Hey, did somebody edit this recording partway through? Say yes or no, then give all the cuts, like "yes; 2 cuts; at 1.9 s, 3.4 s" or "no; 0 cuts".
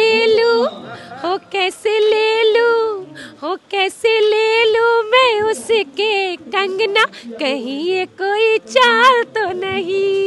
no; 0 cuts